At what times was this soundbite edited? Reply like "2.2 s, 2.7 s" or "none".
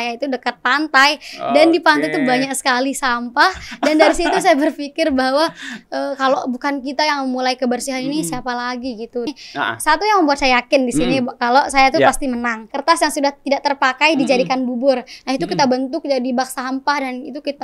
9.3 s, 12.6 s